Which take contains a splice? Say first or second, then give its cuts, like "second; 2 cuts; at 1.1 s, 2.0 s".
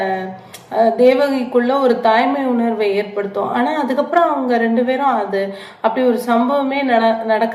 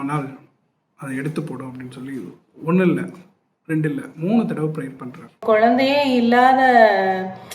second; 1 cut; at 5.4 s